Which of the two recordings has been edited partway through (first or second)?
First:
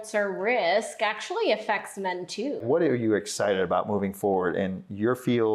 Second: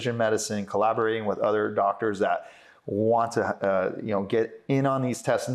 first